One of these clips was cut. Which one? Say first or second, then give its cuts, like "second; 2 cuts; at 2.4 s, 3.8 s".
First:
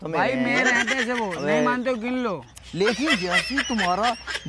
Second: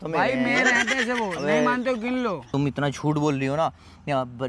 second; 1 cut; at 2.5 s